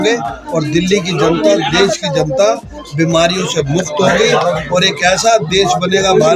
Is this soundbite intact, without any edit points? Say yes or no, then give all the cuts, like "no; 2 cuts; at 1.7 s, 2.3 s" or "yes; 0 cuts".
yes; 0 cuts